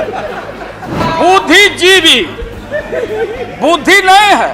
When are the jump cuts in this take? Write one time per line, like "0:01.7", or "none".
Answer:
0:01.0